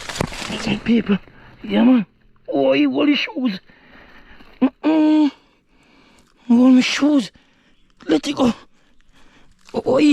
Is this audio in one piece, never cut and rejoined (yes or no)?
yes